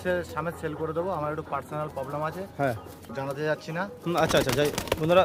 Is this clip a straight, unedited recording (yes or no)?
yes